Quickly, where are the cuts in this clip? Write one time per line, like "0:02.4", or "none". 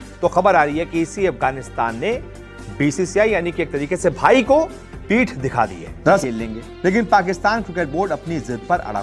none